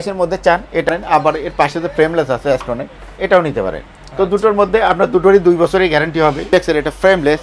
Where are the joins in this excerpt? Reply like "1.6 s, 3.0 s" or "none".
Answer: 0.9 s, 6.5 s